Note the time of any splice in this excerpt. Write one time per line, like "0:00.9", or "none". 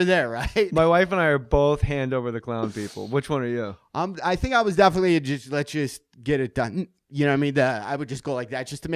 0:03.4